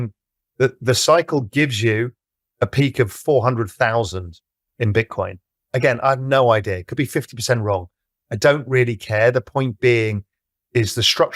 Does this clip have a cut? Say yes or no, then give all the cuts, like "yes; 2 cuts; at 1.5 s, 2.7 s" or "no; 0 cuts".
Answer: no; 0 cuts